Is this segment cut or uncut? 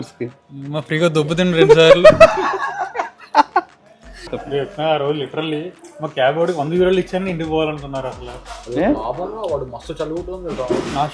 cut